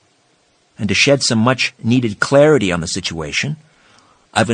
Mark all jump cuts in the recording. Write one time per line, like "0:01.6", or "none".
none